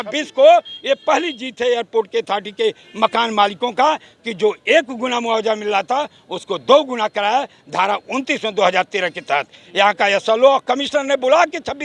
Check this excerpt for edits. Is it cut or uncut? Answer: uncut